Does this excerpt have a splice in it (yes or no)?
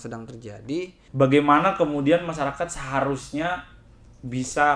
yes